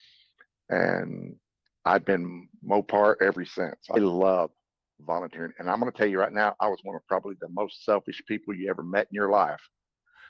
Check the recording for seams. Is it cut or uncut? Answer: cut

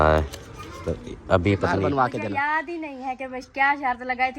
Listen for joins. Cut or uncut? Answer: cut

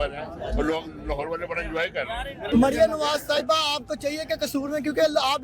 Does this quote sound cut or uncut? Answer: cut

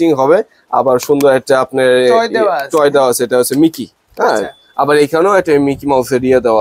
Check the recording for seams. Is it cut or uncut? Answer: uncut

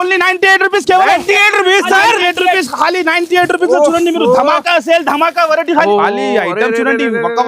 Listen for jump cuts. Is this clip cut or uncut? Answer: cut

